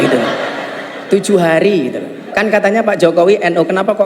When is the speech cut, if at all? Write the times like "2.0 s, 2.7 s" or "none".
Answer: 2.2 s

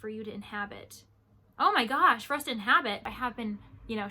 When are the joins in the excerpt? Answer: 3.1 s

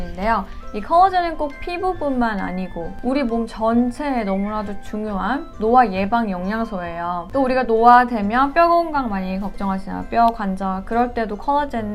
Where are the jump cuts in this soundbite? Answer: 7.2 s

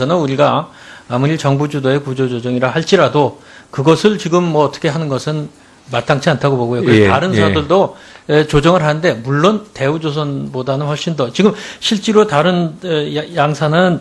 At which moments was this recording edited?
none

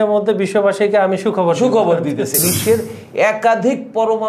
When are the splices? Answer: 2.4 s

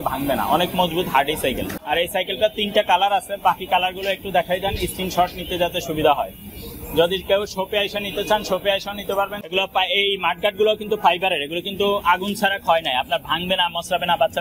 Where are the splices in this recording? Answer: 1.7 s, 9.4 s

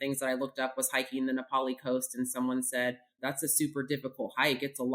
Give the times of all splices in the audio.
3.2 s

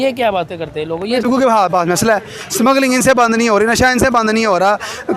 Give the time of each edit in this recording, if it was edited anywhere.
1.2 s

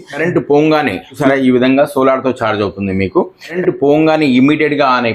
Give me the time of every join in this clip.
1.2 s, 3.6 s

